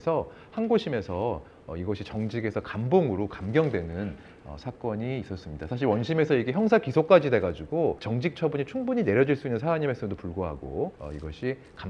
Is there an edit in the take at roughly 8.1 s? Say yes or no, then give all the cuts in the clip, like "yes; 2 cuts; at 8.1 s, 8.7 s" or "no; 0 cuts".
yes; 2 cuts; at 8.1 s, 11.0 s